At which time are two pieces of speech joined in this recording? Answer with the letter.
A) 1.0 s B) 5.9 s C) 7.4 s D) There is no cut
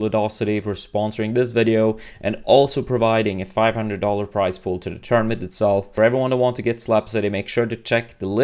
B